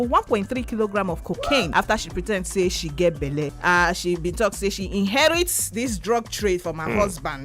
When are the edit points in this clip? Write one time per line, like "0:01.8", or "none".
0:01.7
0:03.5